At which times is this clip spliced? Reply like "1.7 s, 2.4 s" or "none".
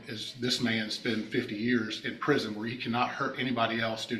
none